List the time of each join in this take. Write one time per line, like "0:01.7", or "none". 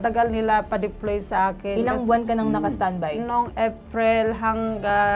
none